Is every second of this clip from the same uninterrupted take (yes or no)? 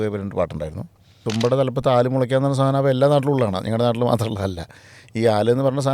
no